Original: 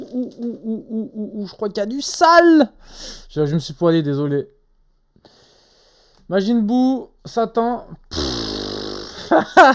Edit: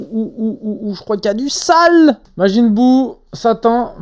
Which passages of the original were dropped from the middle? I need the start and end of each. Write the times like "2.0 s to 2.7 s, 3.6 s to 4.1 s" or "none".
2.8 s to 6.2 s

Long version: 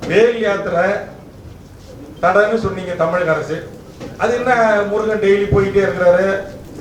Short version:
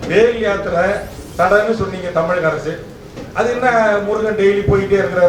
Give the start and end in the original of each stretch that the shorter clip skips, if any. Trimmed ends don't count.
1.2 s to 2.0 s

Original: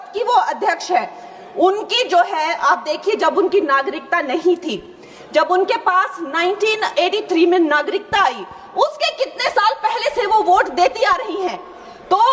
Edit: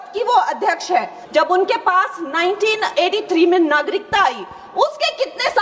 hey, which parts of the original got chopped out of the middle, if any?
1.2 s to 5.2 s

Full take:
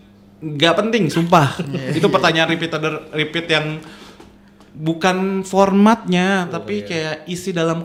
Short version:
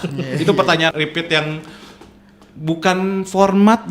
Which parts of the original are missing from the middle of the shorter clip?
2.5 s to 3.1 s

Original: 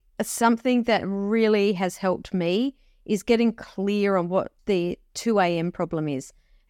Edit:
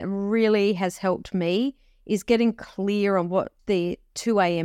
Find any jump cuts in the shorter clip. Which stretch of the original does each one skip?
none

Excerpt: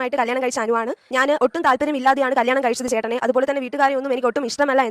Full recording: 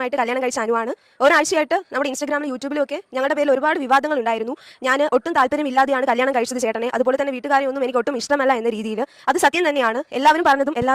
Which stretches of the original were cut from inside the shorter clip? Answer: 1.0 s to 4.7 s

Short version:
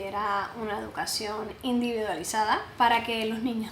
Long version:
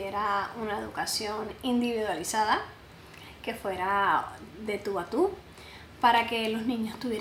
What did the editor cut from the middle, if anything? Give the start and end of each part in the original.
2.7 s to 5.9 s

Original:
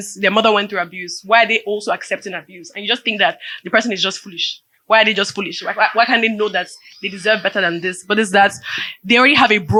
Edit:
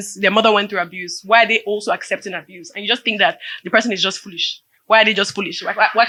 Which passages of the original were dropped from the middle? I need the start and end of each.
none

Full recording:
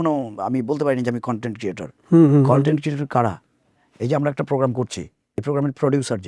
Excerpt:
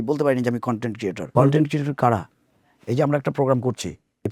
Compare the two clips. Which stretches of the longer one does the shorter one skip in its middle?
1.9 s to 2.5 s

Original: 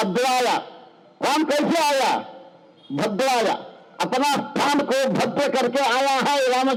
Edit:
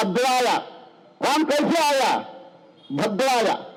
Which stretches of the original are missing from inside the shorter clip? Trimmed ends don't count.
none

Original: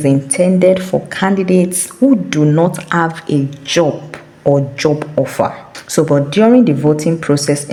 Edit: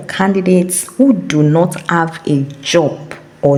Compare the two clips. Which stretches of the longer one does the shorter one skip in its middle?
none

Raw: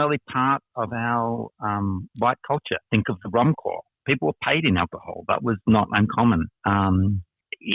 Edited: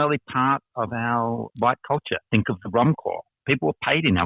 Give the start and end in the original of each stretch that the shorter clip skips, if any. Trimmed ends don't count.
1.5 s to 2.1 s

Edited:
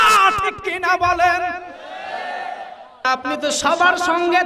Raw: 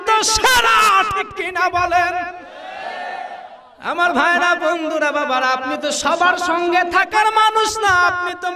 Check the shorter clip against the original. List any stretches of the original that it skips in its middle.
3.8 s to 5.4 s

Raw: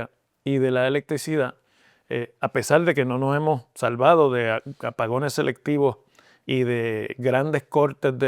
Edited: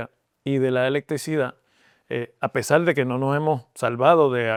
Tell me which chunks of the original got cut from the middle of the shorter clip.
none

